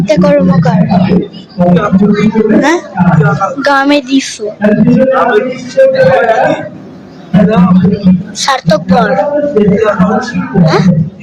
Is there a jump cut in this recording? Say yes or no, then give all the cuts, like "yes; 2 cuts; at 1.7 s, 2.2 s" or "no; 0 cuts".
yes; 1 cut; at 7.3 s